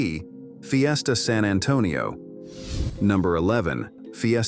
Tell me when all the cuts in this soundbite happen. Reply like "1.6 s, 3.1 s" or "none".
none